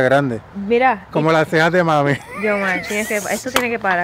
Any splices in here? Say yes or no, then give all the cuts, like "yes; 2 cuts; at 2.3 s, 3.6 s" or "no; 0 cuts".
no; 0 cuts